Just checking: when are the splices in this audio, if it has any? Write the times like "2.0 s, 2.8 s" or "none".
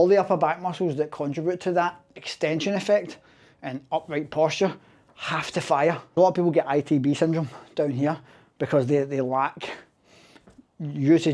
6.1 s